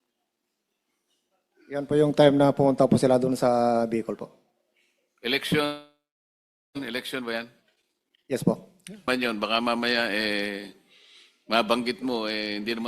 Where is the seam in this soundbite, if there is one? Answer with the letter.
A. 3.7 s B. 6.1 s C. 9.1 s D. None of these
C